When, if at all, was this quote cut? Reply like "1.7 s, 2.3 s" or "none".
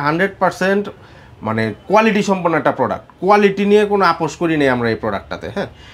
none

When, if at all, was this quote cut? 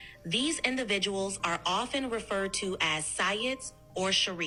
none

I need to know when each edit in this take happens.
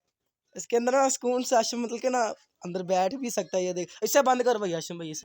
none

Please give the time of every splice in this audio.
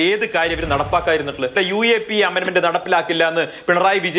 1.5 s

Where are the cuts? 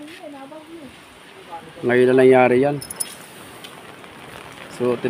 none

